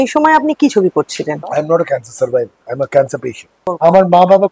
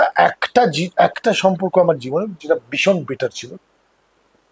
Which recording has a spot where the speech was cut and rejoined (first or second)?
first